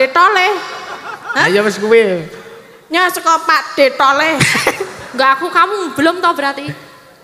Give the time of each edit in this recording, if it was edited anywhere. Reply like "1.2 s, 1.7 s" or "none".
none